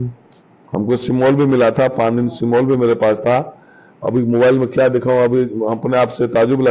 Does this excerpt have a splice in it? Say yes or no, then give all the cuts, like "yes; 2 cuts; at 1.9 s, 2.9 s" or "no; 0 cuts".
no; 0 cuts